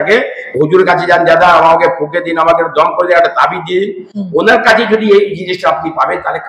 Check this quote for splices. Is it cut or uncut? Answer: uncut